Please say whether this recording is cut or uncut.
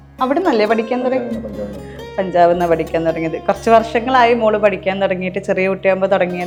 uncut